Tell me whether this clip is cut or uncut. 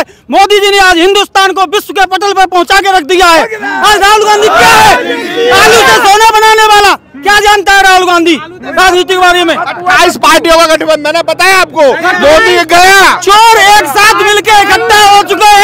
uncut